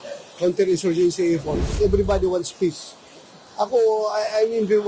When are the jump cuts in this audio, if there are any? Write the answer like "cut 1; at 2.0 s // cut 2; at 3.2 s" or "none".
cut 1; at 1.8 s